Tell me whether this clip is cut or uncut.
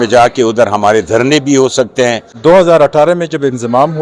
cut